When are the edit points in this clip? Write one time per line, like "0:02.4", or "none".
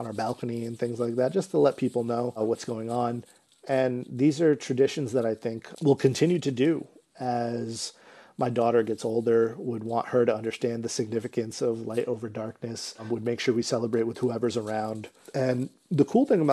none